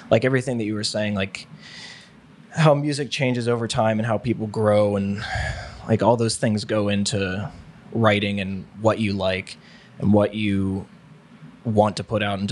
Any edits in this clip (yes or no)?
no